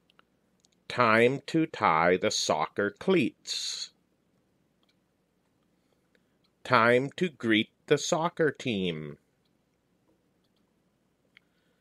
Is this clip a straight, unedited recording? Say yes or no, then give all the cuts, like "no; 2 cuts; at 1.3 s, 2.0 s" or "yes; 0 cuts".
no; 2 cuts; at 5.1 s, 10.5 s